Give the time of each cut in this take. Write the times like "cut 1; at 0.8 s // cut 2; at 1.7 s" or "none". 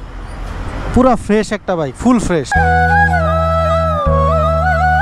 cut 1; at 2.5 s